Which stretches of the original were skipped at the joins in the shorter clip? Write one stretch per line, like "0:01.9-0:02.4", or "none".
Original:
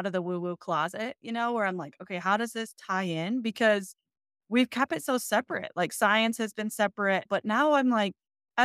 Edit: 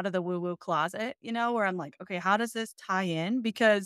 none

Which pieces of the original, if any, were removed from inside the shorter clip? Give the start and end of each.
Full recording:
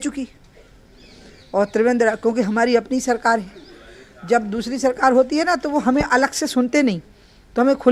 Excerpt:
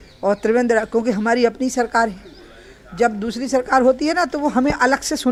none

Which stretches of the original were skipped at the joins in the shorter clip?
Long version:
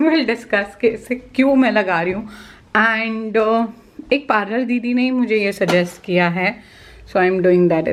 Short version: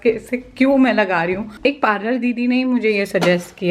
0:02.3-0:04.0

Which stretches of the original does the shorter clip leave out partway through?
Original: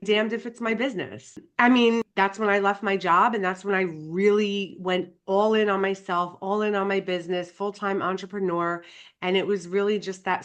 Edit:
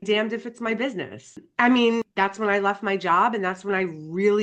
none

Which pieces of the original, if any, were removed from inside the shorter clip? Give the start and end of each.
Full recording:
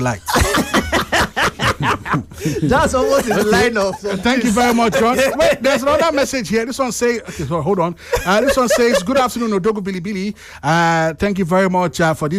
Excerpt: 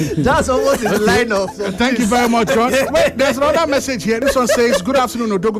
0:06.7-0:08.4

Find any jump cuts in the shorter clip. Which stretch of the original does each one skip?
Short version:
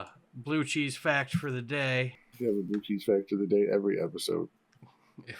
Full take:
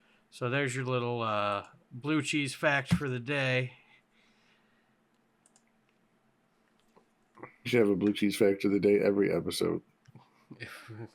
0:03.8-0:07.6

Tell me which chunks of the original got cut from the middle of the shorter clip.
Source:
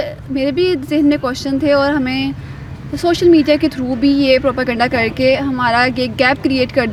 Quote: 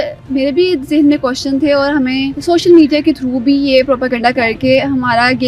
0:02.3-0:02.9

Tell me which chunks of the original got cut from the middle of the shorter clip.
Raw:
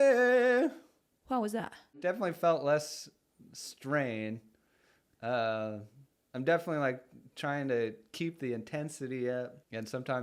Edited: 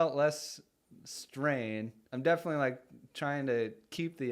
0:04.5-0:06.2

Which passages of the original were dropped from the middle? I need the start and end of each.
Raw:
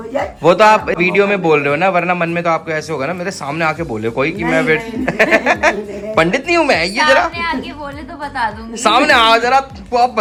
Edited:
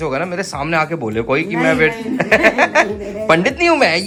none

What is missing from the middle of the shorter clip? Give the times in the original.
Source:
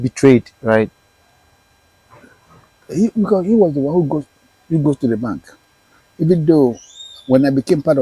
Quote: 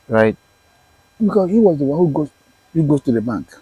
0:01.7-0:03.1

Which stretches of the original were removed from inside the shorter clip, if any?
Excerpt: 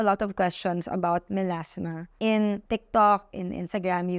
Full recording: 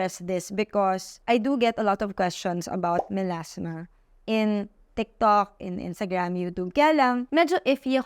0:03.8-0:04.1
0:04.7-0:04.9

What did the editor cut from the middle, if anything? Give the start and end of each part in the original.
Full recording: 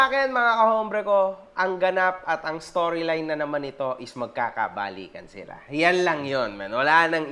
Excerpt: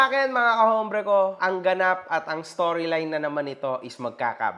0:01.4-0:01.5

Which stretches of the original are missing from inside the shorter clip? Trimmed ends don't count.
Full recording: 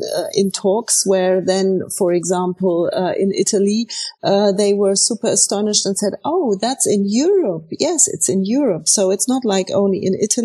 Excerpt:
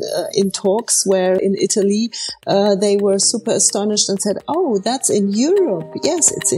0:01.4-0:03.2

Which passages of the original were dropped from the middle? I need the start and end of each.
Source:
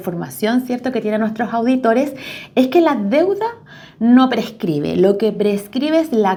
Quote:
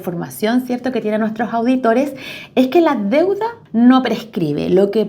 0:03.6-0:03.8

